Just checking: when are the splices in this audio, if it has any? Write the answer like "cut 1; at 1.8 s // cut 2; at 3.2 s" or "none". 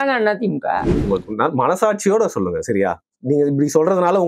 cut 1; at 0.9 s

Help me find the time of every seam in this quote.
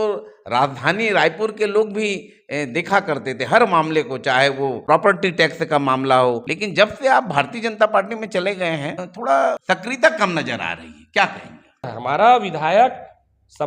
cut 1; at 4.8 s // cut 2; at 6.4 s // cut 3; at 9.1 s // cut 4; at 9.6 s // cut 5; at 12.0 s

